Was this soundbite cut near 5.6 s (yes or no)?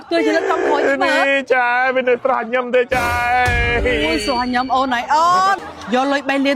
yes